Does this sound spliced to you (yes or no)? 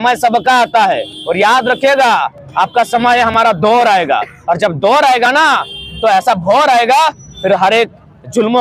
no